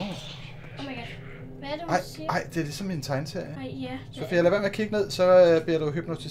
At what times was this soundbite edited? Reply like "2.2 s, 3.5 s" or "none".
none